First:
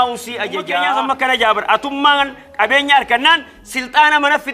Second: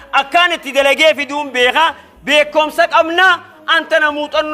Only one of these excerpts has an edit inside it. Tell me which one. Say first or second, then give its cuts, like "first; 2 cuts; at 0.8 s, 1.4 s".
first; 1 cut; at 1.0 s